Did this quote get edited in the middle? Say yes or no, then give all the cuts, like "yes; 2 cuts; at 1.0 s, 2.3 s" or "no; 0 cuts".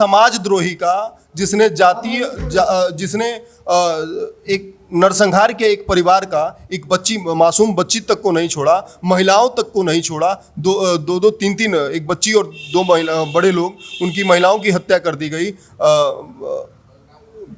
no; 0 cuts